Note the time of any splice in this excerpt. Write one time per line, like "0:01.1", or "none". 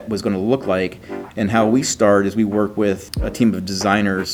0:03.1

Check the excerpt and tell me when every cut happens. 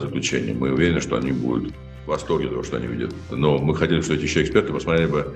0:03.3

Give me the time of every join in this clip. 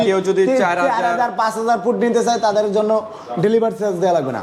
none

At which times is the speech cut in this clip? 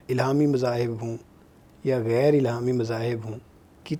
none

